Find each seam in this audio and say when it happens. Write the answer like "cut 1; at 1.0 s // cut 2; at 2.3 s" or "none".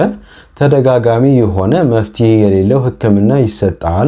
none